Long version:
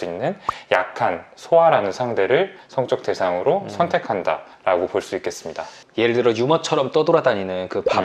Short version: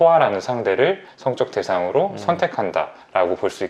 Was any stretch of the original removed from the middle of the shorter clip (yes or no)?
no